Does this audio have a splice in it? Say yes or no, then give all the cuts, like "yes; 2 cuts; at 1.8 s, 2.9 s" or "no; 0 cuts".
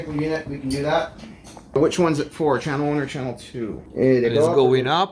yes; 2 cuts; at 1.8 s, 3.8 s